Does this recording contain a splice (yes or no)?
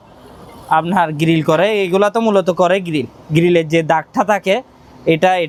no